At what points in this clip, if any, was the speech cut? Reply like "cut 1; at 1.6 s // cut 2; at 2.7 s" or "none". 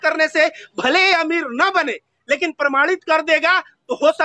none